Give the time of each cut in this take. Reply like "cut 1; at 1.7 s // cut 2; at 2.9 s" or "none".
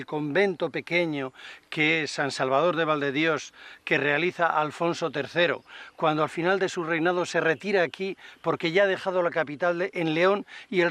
cut 1; at 2.4 s